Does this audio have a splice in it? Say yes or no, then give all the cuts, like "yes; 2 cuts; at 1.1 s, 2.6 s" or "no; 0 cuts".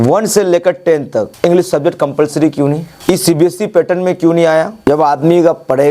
yes; 3 cuts; at 1.3 s, 2.9 s, 4.7 s